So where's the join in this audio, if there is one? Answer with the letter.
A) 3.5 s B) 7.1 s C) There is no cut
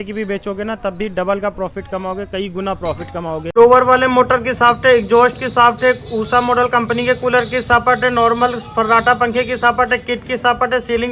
A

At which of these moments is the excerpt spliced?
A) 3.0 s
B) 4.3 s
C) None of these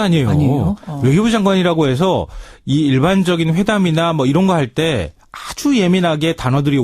A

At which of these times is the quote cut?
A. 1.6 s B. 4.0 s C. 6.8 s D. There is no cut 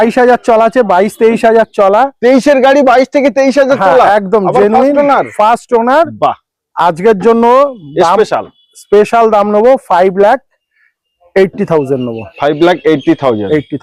D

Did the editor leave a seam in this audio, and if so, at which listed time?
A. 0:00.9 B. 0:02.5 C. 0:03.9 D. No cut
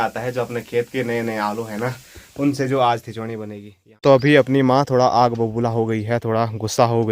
C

